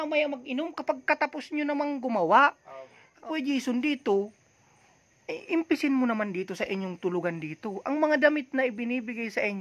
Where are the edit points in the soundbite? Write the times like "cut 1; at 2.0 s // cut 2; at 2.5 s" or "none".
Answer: cut 1; at 3.0 s

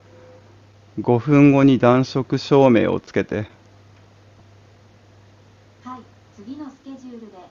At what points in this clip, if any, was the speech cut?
none

